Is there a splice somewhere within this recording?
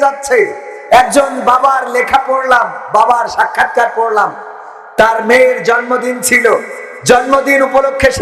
no; 0 cuts

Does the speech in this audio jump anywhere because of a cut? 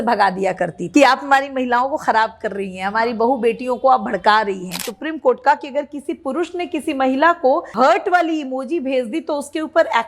yes; 3 cuts; at 0.8 s, 4.9 s, 7.7 s

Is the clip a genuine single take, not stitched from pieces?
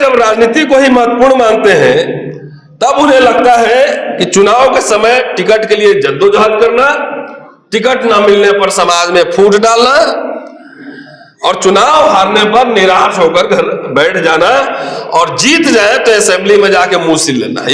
yes; 0 cuts

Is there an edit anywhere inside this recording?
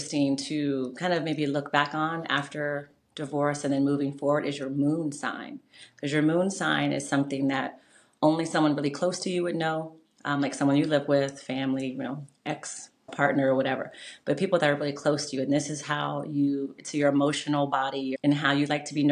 yes; 2 cuts; at 13.1 s, 18.1 s

